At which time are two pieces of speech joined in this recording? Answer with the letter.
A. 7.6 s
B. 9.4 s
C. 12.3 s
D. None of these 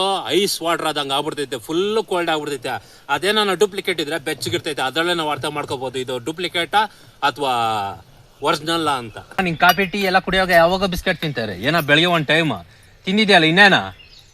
B